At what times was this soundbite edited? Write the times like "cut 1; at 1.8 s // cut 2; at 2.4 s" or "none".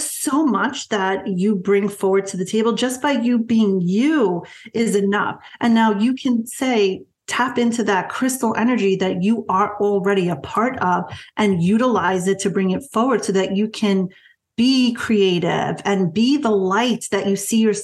none